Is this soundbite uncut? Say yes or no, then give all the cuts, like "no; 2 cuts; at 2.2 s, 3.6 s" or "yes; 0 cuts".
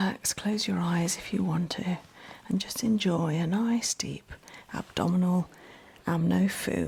yes; 0 cuts